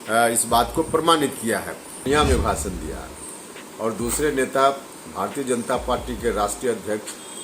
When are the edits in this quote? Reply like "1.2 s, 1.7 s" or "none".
2.0 s